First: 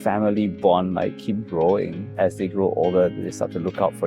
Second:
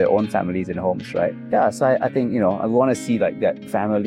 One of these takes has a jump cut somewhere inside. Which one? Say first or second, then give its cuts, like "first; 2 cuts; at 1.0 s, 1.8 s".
first; 1 cut; at 2.1 s